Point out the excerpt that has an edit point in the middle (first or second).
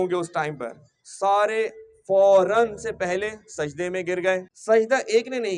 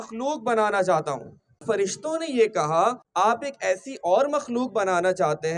second